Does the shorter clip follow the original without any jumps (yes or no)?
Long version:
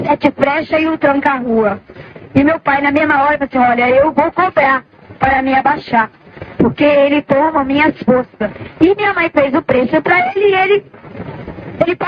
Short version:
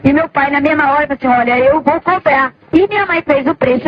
no